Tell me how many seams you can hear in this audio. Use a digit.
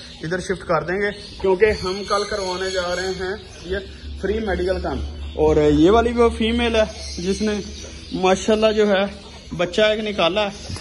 0